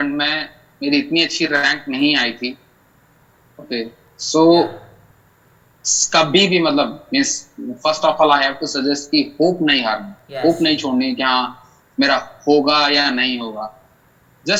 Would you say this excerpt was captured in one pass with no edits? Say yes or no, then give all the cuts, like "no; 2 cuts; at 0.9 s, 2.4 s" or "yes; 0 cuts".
yes; 0 cuts